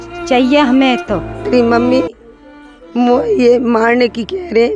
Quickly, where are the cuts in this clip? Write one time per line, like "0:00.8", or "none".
0:01.4